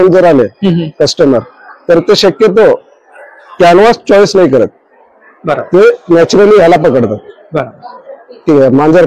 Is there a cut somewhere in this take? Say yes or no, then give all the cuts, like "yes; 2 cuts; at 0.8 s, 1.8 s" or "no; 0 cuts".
no; 0 cuts